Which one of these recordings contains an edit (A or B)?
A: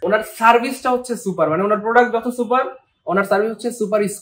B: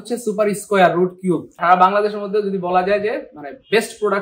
B